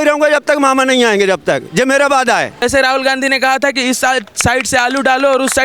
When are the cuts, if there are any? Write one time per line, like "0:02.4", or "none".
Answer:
0:02.6

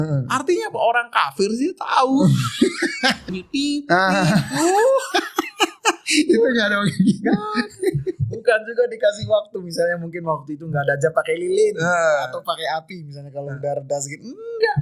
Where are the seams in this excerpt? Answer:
0:03.3

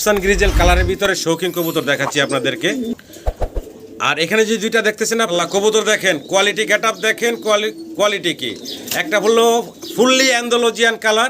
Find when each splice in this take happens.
0:05.3

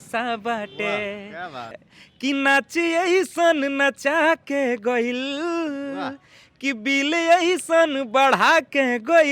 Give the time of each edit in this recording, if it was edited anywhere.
0:01.8

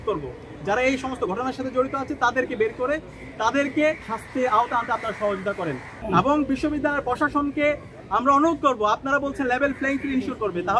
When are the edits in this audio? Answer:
0:04.1
0:05.9

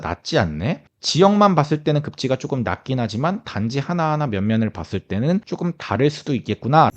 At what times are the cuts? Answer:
0:00.9
0:05.5

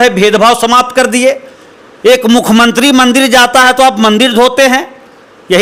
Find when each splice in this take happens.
none

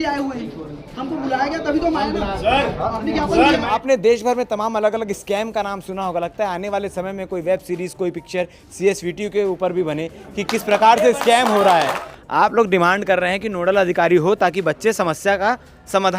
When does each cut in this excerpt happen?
0:03.8
0:12.0

